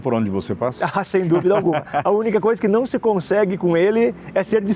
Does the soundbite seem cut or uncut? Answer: uncut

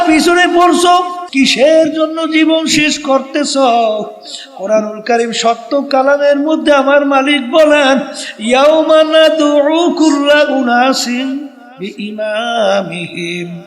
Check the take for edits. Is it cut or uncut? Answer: cut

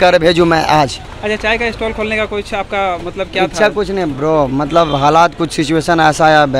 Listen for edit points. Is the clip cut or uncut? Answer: cut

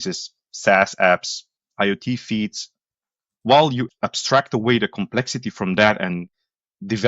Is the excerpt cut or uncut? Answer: cut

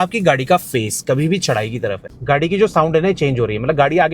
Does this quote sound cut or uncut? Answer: cut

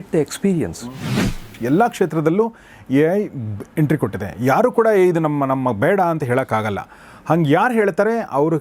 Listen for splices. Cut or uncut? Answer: cut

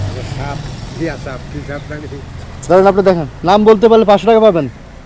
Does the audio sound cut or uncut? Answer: uncut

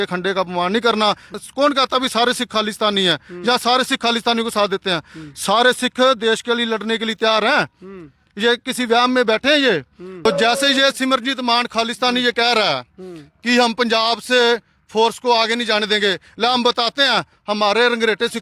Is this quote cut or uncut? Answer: cut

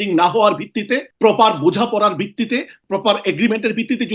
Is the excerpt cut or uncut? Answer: cut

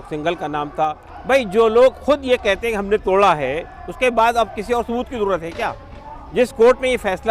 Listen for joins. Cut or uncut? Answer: cut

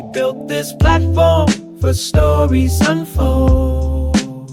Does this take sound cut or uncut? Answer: uncut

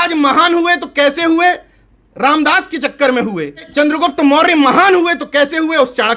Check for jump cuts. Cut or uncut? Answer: cut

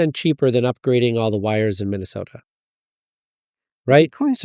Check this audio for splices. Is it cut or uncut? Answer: uncut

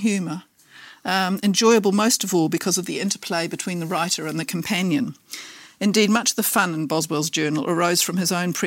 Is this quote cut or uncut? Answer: uncut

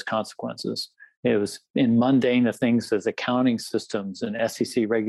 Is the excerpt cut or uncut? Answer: uncut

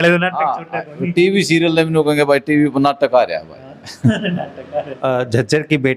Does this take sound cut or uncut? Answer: cut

